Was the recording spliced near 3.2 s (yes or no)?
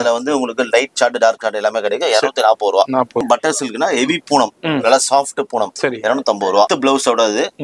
yes